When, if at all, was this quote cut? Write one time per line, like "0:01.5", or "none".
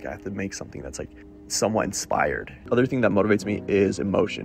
0:01.2
0:02.6